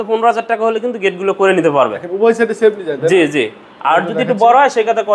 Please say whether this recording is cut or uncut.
uncut